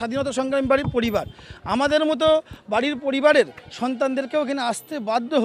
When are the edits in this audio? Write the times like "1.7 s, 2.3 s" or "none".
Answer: none